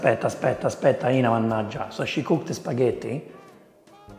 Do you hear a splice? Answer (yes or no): no